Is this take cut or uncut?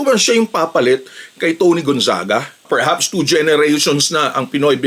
cut